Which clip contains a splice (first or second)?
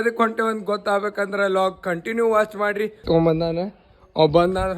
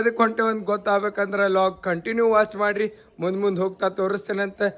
first